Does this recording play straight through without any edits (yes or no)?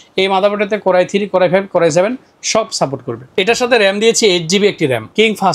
yes